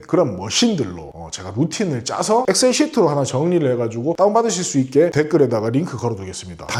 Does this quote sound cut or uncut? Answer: uncut